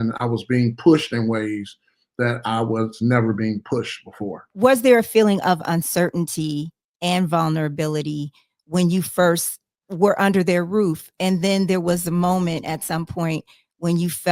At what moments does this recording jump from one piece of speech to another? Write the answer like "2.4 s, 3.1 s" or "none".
4.5 s